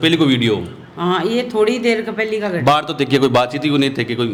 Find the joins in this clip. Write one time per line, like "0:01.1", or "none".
none